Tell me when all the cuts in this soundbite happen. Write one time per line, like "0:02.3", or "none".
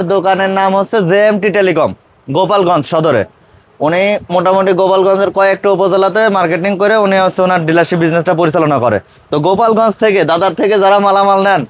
none